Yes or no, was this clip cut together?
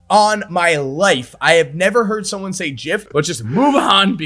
yes